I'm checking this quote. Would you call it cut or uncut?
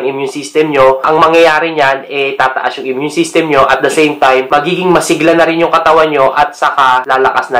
uncut